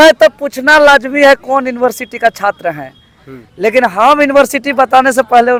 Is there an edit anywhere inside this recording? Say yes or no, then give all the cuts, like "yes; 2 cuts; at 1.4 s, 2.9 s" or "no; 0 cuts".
no; 0 cuts